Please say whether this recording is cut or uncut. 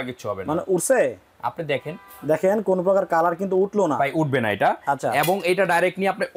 uncut